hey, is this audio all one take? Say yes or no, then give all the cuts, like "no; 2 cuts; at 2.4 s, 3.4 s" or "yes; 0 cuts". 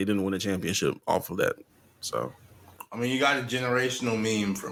yes; 0 cuts